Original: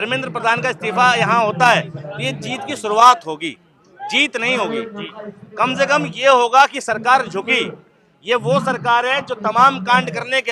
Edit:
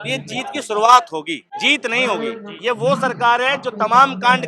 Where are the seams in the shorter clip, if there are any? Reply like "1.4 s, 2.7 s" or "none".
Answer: 1.5 s, 2.5 s

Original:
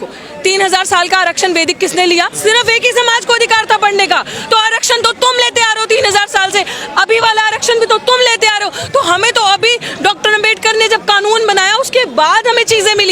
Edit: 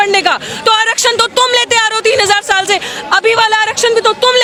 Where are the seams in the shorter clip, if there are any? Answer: none

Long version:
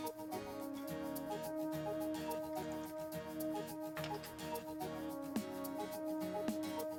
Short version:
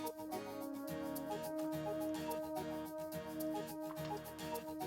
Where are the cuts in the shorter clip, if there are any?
none

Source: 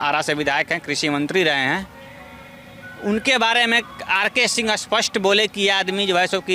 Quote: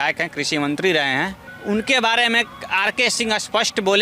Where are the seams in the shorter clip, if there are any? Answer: 1.5 s

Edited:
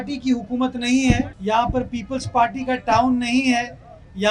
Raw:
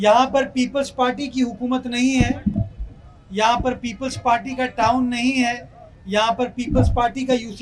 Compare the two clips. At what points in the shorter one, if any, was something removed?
1.3 s

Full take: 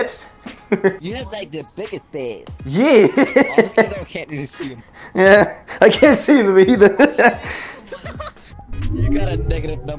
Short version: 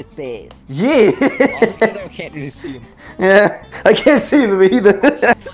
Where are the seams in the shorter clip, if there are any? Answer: none

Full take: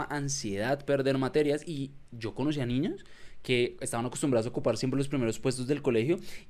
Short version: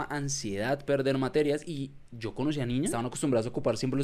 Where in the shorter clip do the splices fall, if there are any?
2.9 s

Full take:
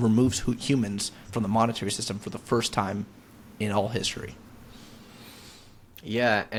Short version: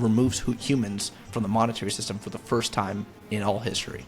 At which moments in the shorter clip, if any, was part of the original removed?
3.2 s

